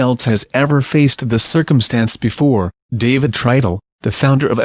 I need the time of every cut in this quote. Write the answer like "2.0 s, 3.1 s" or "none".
2.3 s